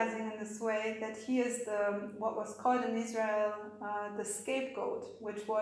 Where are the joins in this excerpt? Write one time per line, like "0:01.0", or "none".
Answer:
none

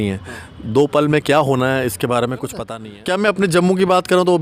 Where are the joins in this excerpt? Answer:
0:02.7

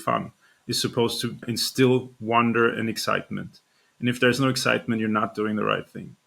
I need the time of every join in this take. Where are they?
0:01.4

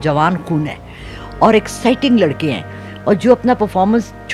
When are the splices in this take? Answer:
none

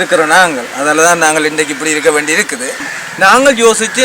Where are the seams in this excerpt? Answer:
0:02.9

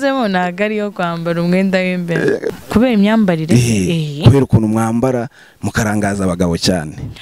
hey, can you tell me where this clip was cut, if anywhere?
0:02.5

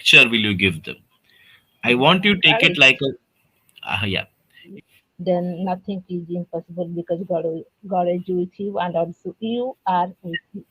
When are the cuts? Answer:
0:04.7

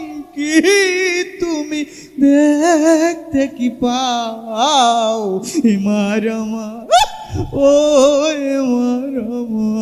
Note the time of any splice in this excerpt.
none

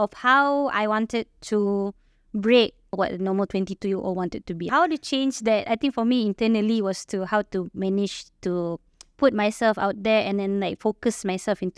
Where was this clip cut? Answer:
0:02.9
0:04.6

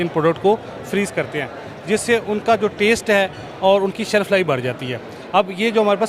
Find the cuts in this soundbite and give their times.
none

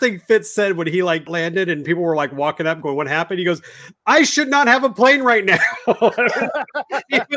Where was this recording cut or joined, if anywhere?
0:01.2

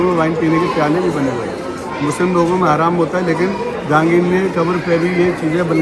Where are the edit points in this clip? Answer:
none

